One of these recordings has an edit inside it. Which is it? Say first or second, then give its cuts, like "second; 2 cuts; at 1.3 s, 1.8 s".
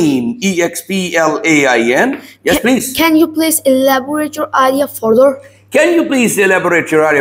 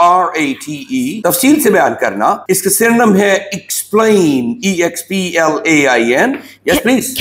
second; 2 cuts; at 1.1 s, 2.4 s